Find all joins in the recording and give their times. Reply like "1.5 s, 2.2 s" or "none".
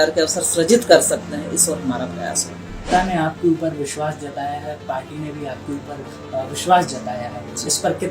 2.9 s